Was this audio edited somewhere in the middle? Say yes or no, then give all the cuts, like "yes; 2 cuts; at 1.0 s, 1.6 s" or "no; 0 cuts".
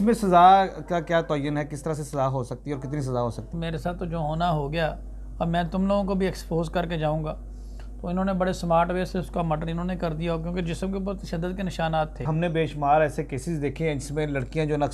yes; 2 cuts; at 3.5 s, 12.2 s